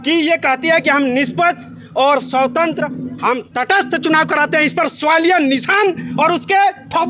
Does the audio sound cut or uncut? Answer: uncut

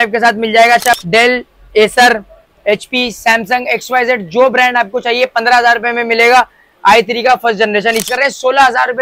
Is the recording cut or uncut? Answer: cut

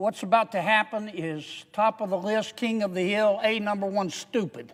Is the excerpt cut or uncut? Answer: uncut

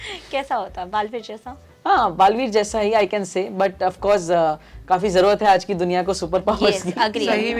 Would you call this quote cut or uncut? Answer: uncut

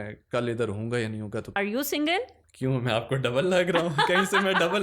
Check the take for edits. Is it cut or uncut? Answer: cut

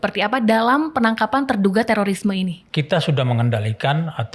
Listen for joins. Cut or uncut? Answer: cut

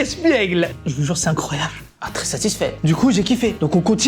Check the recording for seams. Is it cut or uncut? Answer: cut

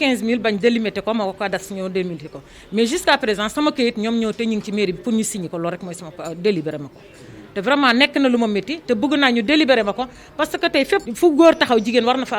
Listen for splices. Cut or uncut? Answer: cut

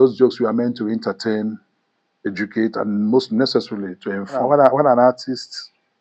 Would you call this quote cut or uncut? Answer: cut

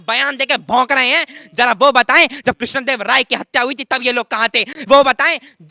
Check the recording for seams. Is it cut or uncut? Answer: uncut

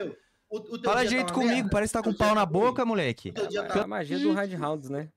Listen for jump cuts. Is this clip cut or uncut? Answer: cut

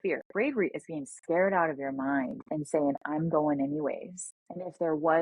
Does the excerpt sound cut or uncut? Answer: uncut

